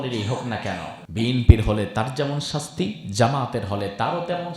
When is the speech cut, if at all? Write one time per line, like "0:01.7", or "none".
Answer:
0:01.0